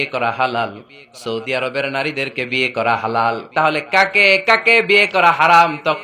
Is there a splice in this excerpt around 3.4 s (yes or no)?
yes